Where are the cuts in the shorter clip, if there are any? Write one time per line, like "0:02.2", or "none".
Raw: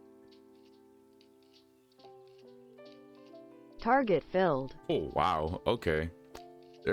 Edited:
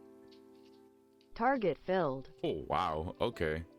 0:01.3